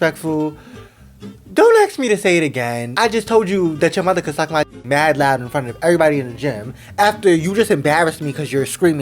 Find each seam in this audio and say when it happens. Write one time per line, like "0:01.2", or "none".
0:02.9